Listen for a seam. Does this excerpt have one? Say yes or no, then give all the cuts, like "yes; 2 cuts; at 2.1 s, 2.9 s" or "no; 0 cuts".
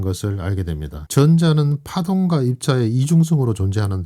no; 0 cuts